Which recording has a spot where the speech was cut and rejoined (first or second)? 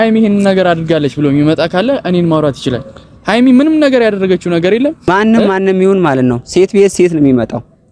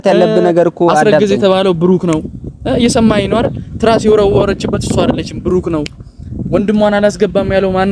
first